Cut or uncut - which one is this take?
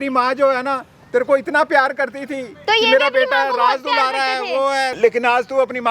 cut